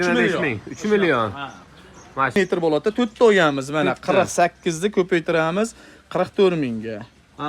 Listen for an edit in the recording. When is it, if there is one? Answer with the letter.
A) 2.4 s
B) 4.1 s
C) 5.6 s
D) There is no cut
A